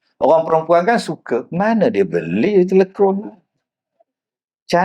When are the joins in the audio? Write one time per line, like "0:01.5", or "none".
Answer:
0:01.5